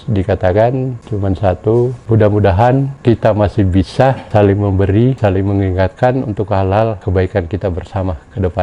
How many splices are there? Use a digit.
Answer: 6